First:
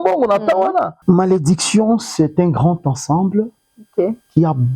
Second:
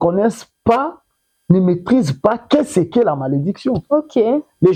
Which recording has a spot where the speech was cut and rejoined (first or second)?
first